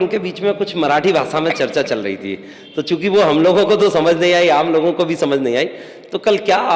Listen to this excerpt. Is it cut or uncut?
uncut